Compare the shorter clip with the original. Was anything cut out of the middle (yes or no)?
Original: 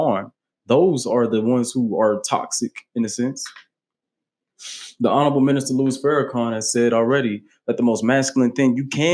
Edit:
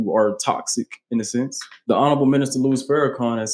yes